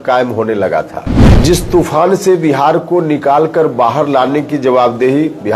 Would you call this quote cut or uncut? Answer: cut